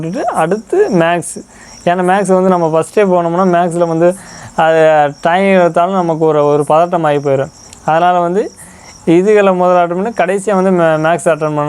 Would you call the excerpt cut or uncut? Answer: uncut